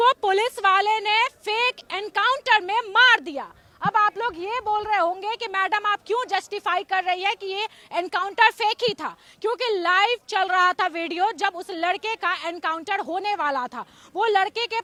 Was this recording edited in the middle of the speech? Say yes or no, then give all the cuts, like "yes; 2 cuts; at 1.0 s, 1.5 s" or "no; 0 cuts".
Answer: no; 0 cuts